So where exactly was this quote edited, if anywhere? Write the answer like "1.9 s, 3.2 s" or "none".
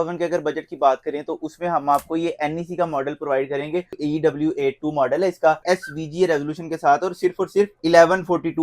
4.0 s, 5.6 s, 7.8 s